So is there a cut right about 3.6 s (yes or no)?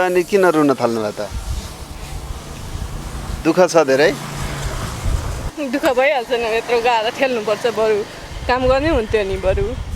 no